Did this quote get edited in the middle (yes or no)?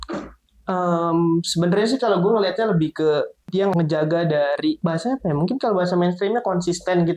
yes